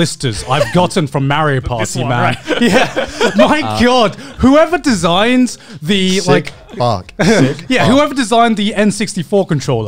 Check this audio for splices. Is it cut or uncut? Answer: uncut